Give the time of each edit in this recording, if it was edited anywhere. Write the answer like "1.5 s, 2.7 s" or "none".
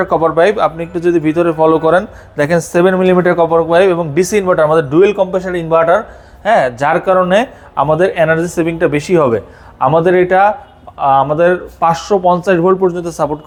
none

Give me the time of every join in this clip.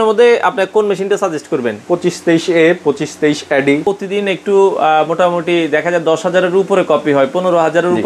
3.8 s

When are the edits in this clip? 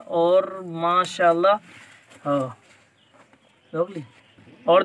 none

